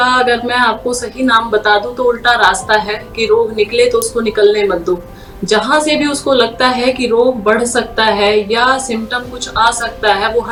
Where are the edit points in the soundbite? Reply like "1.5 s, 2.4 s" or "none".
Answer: none